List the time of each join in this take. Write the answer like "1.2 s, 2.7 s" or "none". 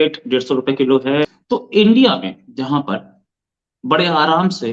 1.3 s